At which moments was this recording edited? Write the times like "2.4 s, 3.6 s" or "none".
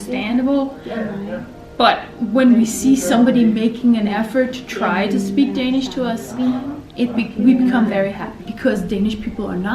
8.4 s